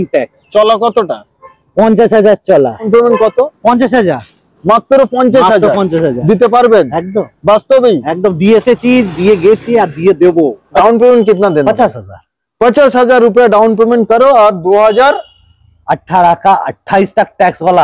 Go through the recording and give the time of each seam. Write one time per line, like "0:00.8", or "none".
0:02.9
0:10.8